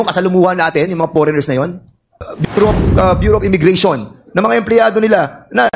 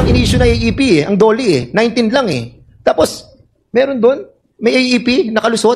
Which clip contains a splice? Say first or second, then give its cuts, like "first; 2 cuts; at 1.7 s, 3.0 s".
first; 1 cut; at 2.1 s